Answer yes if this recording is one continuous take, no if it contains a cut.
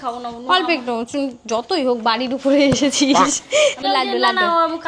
no